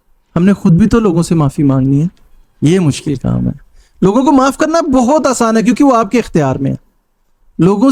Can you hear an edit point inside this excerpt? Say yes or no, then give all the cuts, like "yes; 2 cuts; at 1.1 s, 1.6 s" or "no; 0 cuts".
no; 0 cuts